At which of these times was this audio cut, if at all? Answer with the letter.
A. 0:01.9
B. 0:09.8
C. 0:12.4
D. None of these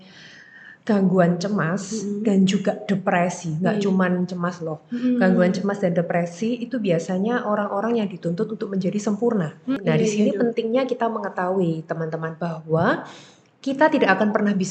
B